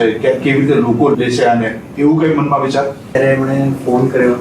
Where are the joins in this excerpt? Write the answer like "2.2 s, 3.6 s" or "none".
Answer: 1.1 s, 3.1 s